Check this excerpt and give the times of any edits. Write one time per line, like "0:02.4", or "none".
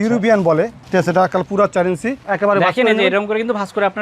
0:02.2